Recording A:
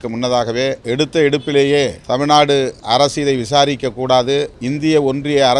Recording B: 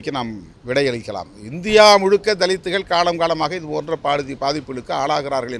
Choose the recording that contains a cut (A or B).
A